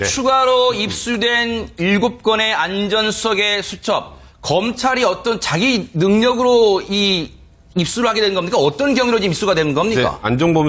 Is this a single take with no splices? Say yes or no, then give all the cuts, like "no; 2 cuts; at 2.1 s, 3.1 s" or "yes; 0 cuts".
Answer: no; 1 cut; at 5.9 s